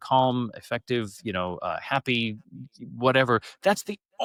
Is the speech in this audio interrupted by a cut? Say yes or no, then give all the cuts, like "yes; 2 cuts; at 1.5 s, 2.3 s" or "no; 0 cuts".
no; 0 cuts